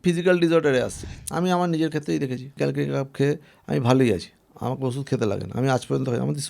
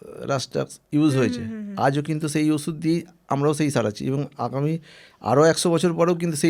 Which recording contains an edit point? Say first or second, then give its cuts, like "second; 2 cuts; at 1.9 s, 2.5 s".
first; 2 cuts; at 1.0 s, 2.5 s